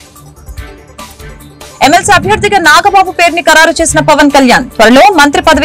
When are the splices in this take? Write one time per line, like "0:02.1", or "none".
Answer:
0:00.9